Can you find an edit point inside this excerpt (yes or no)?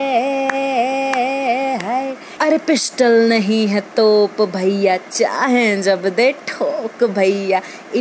yes